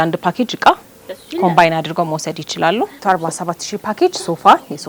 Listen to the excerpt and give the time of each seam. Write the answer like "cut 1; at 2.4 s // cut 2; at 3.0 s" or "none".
cut 1; at 3.0 s

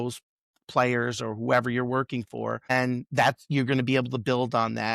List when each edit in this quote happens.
cut 1; at 2.7 s

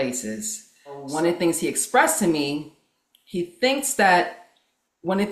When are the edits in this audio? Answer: cut 1; at 1.1 s

